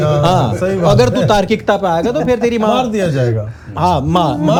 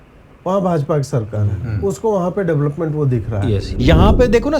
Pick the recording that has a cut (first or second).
second